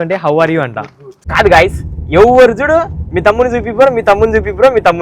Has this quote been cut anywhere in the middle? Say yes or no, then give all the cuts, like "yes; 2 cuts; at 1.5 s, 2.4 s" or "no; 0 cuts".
yes; 1 cut; at 1.2 s